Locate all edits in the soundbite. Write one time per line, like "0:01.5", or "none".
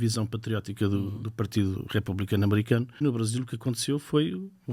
0:03.0